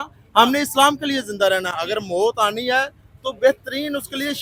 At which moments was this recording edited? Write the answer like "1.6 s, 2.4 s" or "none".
none